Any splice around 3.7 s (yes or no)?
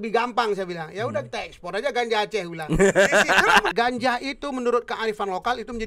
yes